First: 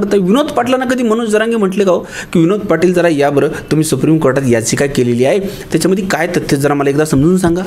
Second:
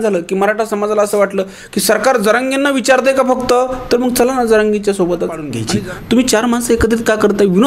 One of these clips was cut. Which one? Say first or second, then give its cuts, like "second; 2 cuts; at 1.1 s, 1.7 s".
second; 1 cut; at 5.6 s